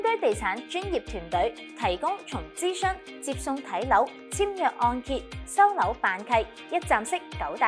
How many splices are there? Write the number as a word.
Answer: zero